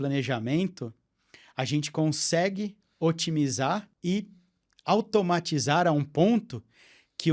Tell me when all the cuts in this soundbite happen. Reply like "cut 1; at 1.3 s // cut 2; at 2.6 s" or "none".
cut 1; at 3.9 s